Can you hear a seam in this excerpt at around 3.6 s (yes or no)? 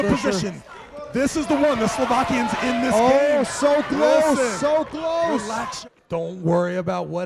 no